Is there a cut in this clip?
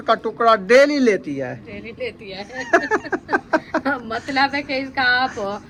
no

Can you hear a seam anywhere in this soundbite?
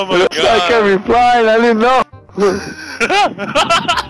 no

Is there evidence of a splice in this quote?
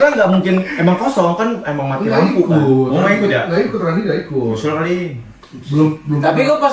no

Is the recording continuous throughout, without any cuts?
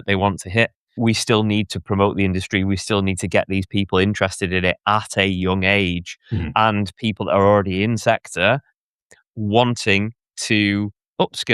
no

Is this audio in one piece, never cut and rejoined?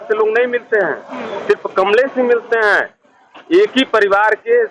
yes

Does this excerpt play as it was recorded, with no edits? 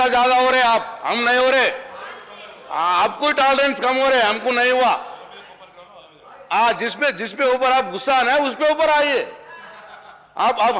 yes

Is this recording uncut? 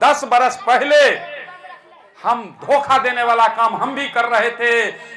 yes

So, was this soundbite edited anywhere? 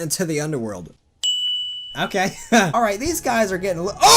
yes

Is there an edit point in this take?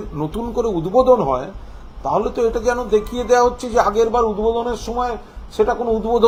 no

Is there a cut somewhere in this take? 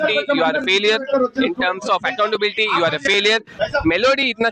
yes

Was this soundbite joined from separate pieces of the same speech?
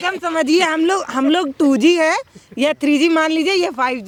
no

